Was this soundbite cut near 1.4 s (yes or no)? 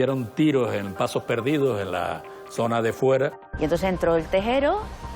no